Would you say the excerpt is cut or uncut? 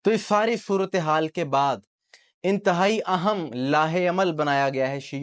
uncut